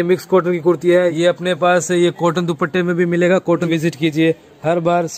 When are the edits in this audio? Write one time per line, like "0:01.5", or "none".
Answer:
0:01.1
0:03.7